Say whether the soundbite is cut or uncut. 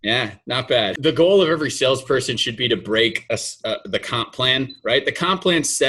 cut